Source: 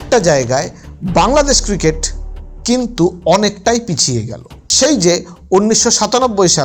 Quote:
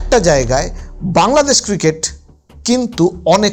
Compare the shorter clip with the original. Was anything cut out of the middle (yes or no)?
no